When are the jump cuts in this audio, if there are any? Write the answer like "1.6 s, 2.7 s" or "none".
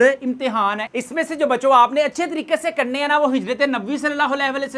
0.9 s